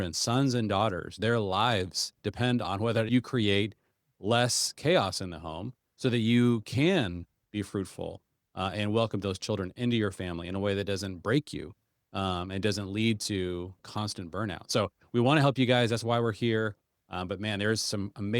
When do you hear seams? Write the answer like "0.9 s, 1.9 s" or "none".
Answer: 3.1 s, 13.8 s